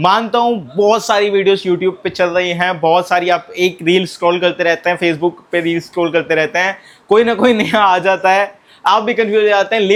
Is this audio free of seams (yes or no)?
yes